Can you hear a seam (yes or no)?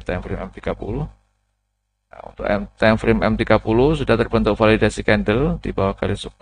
no